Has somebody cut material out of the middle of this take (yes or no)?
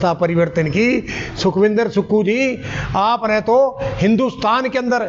no